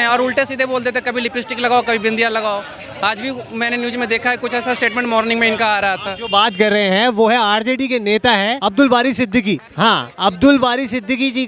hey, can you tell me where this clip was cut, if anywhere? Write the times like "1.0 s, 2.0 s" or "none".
none

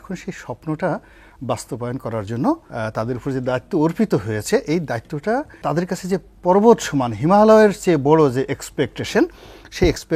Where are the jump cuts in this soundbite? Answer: 2.7 s, 5.6 s

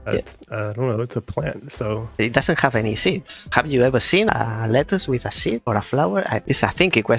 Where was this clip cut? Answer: 2.1 s, 3.3 s, 4.3 s, 5.6 s, 6.4 s

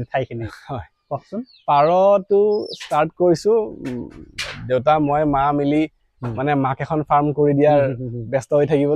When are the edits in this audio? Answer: none

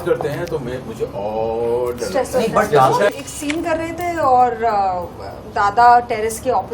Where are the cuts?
3.1 s

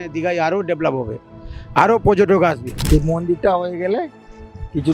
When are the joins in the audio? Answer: 2.7 s

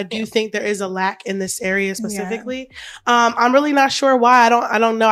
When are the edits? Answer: none

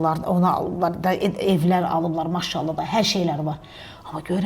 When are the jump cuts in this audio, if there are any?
none

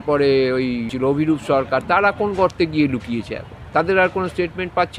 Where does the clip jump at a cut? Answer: 0.9 s

